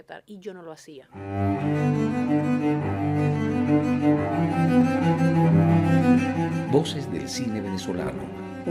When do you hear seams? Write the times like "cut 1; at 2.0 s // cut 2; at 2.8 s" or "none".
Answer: cut 1; at 1.1 s